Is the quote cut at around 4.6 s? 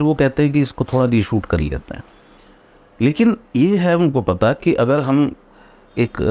no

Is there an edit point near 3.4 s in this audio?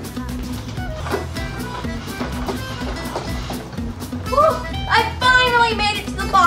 no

